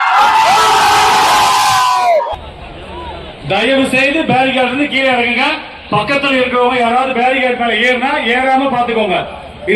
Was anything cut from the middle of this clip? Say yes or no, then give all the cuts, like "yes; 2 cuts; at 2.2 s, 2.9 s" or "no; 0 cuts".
yes; 1 cut; at 2.3 s